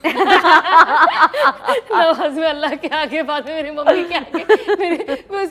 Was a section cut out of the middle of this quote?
no; 0 cuts

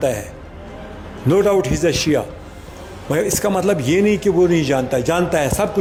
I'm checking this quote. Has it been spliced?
no; 0 cuts

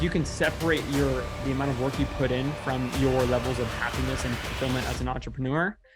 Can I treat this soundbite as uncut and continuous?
yes; 0 cuts

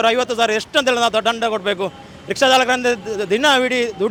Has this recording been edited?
no; 0 cuts

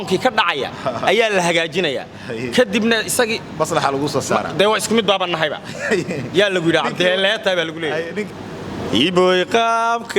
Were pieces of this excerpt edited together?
yes; 1 cut; at 8.2 s

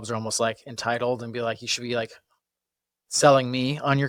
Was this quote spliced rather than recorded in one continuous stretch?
no; 0 cuts

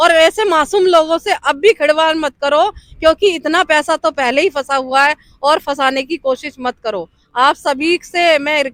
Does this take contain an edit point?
no; 0 cuts

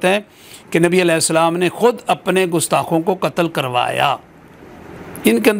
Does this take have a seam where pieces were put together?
no; 0 cuts

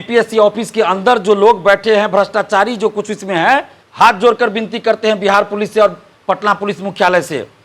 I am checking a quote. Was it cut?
yes; 1 cut; at 3.8 s

